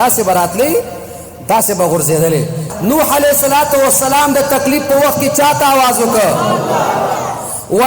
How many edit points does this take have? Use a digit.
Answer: 1